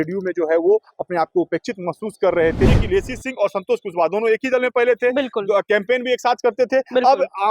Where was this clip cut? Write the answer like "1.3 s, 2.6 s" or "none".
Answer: 2.8 s